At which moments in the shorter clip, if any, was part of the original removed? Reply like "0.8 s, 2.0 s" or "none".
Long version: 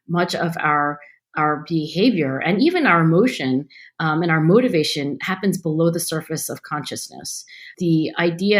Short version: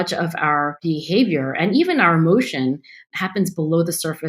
0.8 s, 3.0 s